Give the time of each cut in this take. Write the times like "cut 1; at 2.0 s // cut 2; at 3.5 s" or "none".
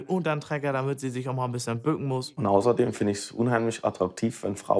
cut 1; at 2.3 s